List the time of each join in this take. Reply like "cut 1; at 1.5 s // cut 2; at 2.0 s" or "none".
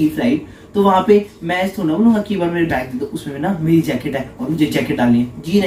none